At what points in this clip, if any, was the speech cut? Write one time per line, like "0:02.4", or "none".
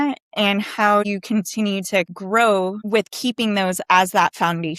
0:01.0
0:02.1
0:02.8